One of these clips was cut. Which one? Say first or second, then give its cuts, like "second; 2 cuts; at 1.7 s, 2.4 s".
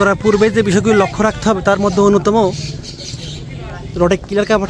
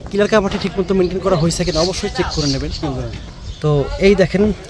second; 1 cut; at 2.8 s